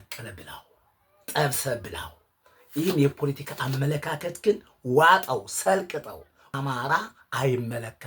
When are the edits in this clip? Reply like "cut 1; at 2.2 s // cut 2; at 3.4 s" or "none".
cut 1; at 6.4 s